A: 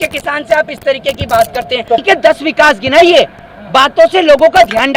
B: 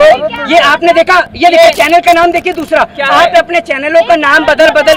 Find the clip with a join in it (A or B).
A